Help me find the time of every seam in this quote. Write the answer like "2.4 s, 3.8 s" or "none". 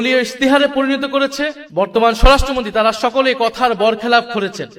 1.6 s

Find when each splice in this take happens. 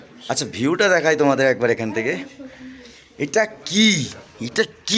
none

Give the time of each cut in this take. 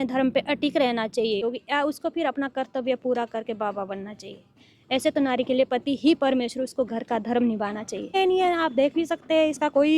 1.4 s, 8.1 s

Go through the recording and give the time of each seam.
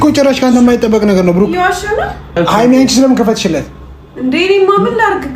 2.4 s

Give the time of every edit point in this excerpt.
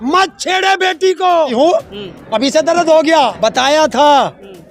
1.5 s, 3.3 s

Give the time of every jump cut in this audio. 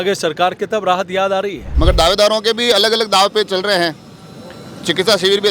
1.7 s

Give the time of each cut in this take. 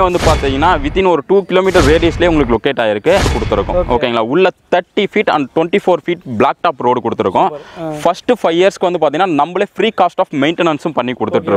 3.3 s

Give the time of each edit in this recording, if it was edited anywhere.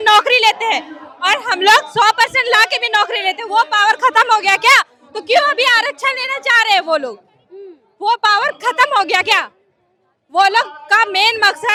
none

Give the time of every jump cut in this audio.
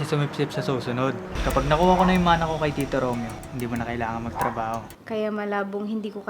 1.3 s, 3.4 s, 4.9 s

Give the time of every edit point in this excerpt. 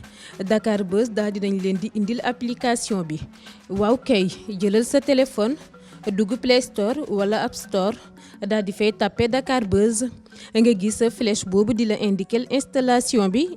none

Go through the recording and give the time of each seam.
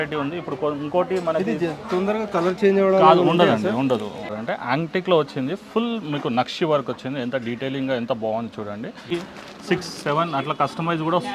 4.3 s, 9.1 s

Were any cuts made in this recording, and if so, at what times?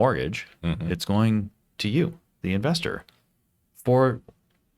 none

